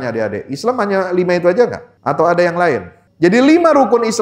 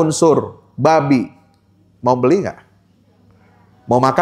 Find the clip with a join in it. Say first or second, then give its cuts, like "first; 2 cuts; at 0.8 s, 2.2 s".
first; 2 cuts; at 1.9 s, 3.0 s